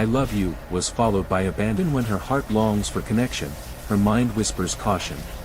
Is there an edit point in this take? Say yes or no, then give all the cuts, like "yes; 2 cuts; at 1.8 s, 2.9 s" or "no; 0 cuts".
yes; 1 cut; at 1.8 s